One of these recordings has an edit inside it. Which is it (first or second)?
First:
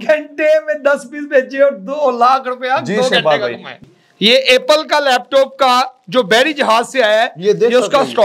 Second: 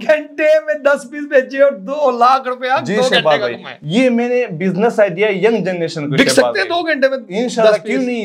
first